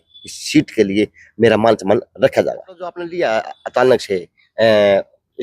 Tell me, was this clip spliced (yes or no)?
yes